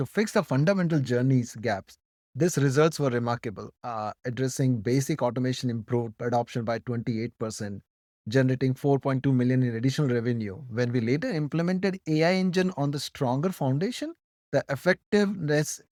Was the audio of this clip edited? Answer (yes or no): no